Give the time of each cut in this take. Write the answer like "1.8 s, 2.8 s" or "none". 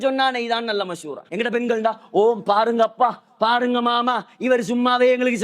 1.3 s